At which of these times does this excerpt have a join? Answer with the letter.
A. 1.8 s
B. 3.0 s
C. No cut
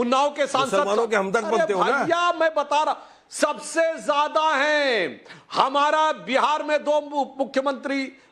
C